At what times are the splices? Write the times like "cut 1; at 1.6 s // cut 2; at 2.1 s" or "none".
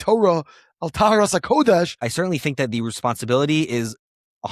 cut 1; at 2.0 s